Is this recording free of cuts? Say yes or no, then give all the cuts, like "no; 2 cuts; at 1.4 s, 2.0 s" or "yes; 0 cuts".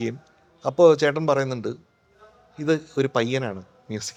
yes; 0 cuts